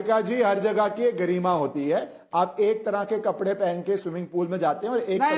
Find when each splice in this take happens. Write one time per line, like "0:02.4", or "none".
0:01.3